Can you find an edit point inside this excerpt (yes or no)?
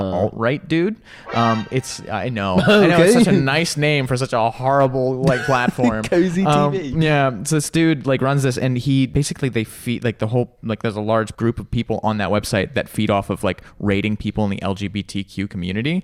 yes